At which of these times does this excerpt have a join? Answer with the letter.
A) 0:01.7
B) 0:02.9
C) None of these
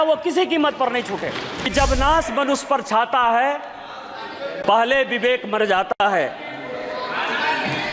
A